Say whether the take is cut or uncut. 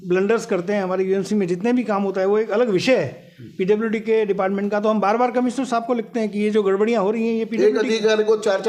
uncut